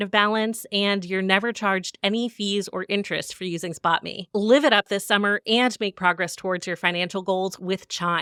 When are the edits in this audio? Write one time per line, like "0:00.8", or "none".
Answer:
none